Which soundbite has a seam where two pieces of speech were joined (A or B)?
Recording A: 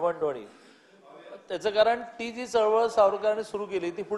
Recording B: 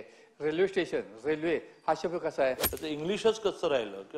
B